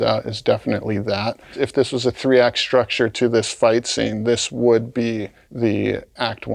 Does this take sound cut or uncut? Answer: cut